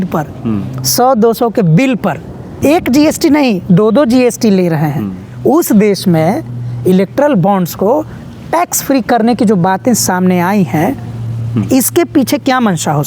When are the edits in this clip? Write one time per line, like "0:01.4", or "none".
0:02.5